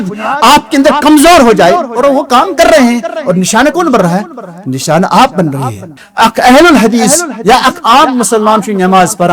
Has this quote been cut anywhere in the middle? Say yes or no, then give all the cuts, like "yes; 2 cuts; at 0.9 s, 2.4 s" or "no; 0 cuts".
yes; 1 cut; at 5.9 s